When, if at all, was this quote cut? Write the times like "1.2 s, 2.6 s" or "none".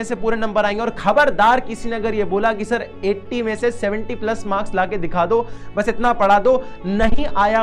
none